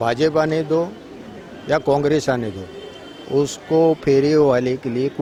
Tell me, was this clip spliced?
no; 0 cuts

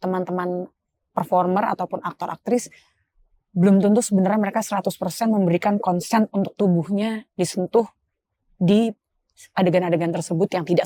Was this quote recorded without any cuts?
yes; 0 cuts

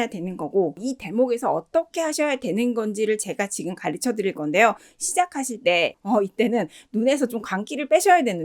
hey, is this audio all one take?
no; 2 cuts; at 0.8 s, 6.0 s

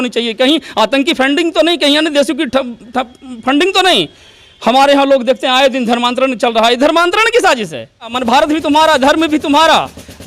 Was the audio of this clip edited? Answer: yes; 1 cut; at 8.2 s

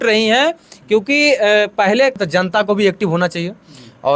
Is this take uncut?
no; 1 cut; at 2.2 s

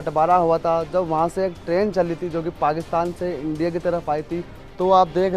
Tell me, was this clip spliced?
no; 0 cuts

